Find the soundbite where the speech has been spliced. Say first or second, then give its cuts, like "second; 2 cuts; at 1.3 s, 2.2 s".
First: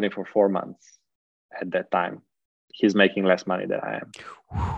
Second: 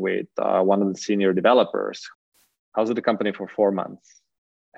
second; 1 cut; at 2.0 s